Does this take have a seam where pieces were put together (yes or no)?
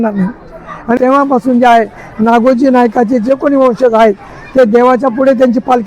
yes